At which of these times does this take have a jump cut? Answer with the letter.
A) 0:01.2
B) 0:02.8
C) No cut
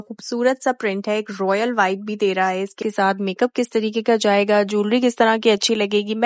B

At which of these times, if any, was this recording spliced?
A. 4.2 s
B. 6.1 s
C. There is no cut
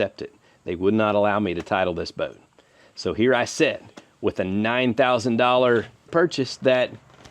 B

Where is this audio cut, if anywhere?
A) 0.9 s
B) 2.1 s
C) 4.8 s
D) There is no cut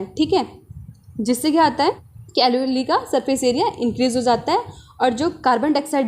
B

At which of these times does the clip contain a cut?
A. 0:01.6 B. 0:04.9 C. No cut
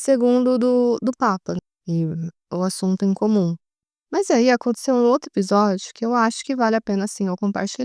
A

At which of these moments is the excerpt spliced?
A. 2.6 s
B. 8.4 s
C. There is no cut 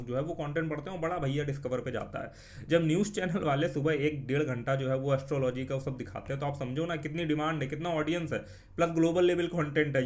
C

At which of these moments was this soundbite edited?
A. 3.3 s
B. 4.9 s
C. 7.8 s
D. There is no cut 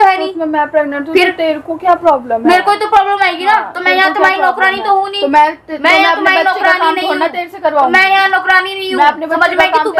D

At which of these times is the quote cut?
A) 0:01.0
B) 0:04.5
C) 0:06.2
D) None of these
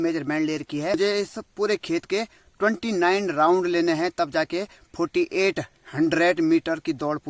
A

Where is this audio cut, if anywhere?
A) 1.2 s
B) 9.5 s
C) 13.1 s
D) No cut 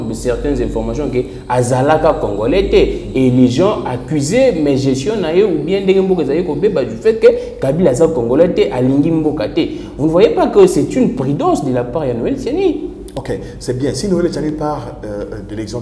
D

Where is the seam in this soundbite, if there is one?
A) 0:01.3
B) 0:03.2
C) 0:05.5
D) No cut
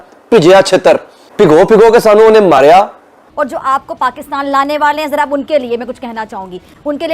B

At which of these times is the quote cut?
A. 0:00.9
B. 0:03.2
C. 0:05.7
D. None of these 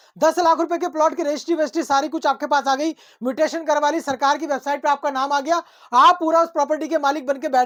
D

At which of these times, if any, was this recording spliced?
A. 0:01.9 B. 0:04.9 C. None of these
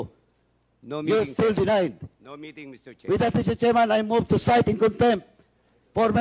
C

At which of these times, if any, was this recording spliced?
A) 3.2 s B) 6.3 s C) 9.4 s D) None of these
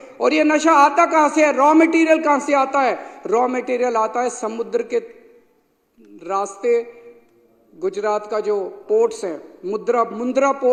D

